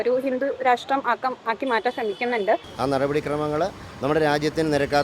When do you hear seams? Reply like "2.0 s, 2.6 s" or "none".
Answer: 2.7 s